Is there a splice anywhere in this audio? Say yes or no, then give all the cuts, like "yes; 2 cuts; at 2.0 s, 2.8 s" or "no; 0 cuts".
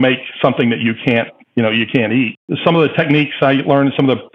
yes; 1 cut; at 2.3 s